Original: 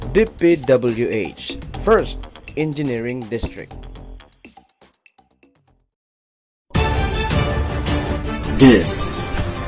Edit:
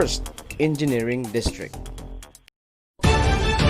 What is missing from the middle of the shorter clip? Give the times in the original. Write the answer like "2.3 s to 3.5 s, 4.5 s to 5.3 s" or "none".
4.3 s to 6.0 s